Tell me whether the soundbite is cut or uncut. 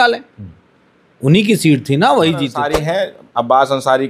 cut